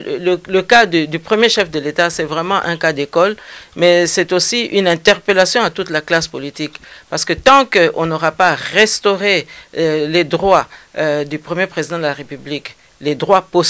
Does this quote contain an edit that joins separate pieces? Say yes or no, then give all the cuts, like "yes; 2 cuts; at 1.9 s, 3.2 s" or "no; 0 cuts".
no; 0 cuts